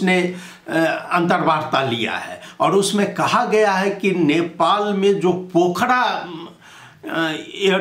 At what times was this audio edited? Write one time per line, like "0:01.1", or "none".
none